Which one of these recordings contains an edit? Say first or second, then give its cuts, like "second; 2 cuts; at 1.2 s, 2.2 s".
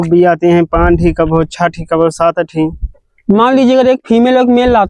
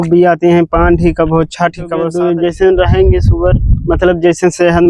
second; 1 cut; at 2.1 s